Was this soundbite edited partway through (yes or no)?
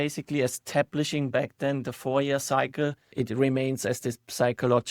yes